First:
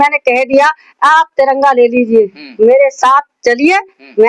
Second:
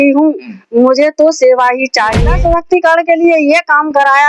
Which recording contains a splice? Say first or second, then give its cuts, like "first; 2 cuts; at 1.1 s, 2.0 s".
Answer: second; 1 cut; at 2.2 s